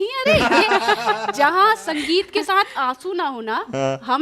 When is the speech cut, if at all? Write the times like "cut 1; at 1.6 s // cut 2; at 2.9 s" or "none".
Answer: none